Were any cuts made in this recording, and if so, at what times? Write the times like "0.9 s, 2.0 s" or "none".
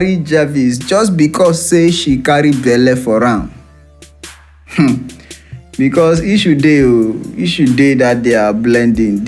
none